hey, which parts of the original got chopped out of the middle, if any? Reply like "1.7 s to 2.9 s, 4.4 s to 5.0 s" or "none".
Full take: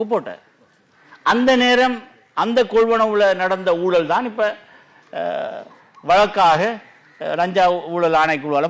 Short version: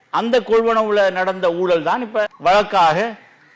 4.6 s to 6.0 s